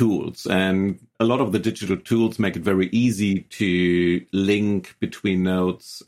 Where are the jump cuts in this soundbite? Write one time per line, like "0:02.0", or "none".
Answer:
0:01.1